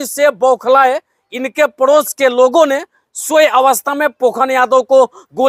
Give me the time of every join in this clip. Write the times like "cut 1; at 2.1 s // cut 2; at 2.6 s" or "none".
none